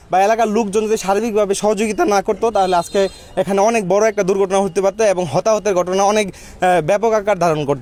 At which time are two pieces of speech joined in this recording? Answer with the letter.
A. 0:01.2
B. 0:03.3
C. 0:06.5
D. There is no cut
D